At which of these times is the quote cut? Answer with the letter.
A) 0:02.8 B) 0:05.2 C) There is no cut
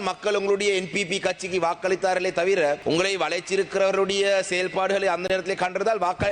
A